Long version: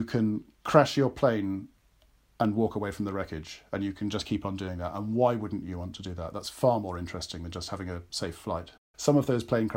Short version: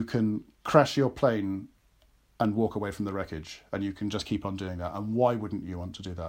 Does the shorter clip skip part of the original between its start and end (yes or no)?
no